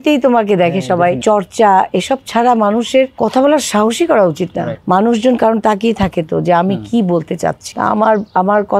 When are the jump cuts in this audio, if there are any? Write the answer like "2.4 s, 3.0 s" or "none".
1.2 s, 3.1 s, 4.7 s, 7.6 s